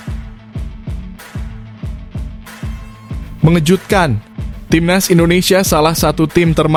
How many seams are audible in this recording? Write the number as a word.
zero